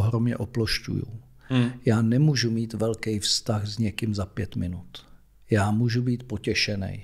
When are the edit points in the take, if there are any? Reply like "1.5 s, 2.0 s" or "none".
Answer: none